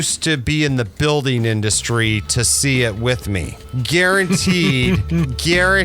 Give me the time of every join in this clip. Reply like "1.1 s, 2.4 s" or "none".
none